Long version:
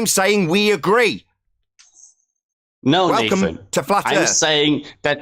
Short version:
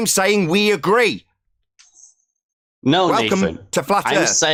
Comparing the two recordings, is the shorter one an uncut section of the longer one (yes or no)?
yes